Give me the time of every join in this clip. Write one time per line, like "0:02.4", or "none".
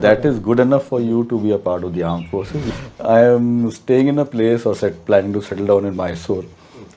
0:02.7